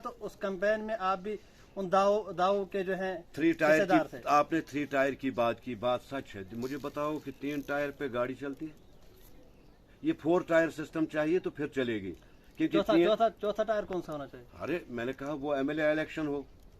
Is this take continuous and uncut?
yes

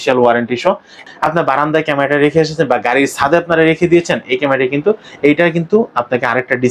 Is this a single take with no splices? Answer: no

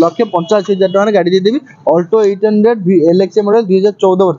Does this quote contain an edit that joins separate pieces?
no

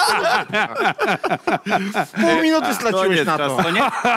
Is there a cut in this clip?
no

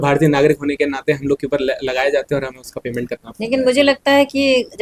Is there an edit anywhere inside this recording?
no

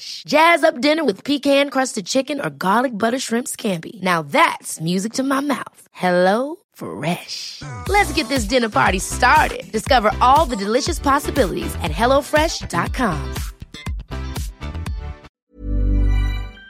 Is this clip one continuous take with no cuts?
no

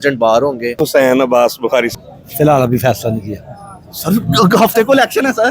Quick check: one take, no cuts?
no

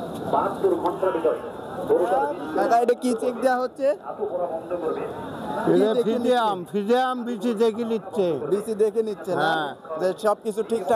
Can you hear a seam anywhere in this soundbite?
no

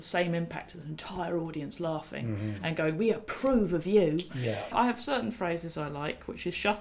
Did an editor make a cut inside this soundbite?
yes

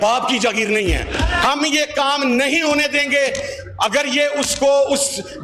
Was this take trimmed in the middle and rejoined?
no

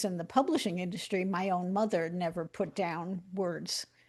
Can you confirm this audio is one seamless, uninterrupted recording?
yes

